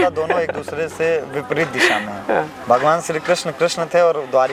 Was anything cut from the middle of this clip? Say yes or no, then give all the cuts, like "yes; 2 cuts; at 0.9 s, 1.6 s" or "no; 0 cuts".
no; 0 cuts